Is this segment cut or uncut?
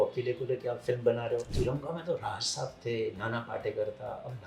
cut